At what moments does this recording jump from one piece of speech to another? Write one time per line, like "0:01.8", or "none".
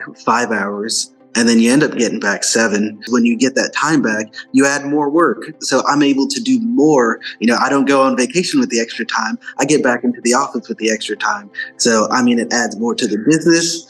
0:03.1
0:05.6